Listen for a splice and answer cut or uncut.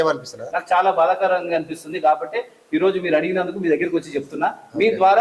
uncut